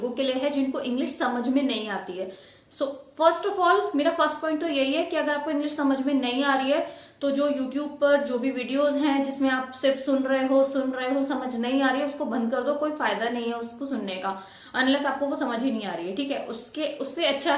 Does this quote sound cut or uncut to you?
uncut